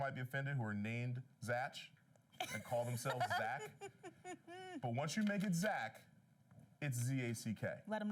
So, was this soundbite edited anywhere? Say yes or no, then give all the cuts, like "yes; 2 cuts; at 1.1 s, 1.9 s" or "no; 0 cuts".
no; 0 cuts